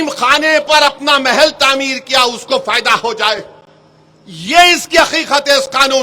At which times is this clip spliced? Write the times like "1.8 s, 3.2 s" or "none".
none